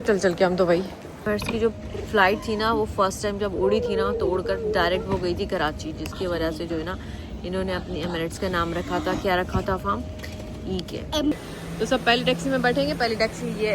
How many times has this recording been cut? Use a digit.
2